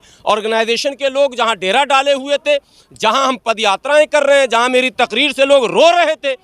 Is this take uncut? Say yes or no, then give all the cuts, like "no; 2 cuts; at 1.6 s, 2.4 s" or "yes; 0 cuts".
yes; 0 cuts